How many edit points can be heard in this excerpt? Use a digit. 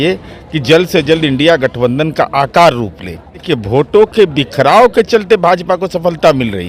1